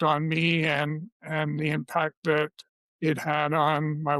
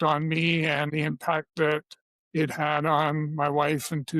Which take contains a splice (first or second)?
second